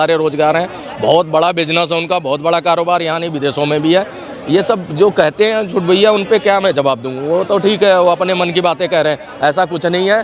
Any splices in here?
no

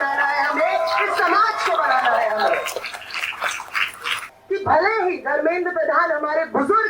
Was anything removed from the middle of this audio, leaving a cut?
yes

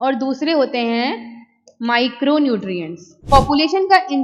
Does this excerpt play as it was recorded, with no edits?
no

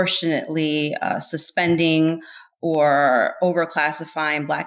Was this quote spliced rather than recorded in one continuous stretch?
no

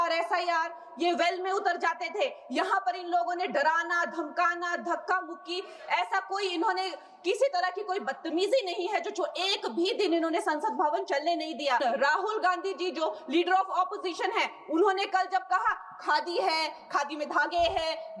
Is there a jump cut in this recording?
yes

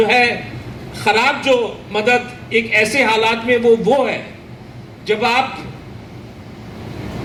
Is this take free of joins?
yes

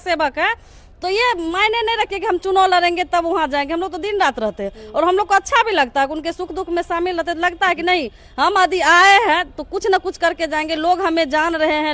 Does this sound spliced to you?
no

